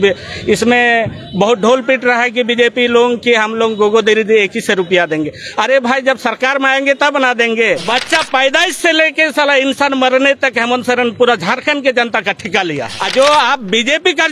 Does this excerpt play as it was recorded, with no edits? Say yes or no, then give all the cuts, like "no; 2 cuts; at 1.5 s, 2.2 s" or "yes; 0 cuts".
no; 2 cuts; at 7.8 s, 13.0 s